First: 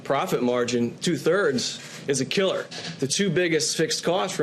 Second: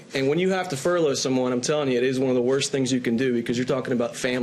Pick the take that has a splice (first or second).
first